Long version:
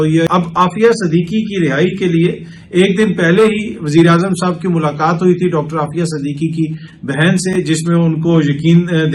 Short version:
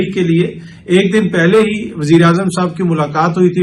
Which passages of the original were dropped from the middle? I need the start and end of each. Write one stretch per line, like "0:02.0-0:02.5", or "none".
none